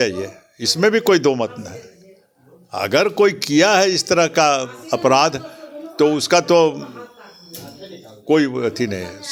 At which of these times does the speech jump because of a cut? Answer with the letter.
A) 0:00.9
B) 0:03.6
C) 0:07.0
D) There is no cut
D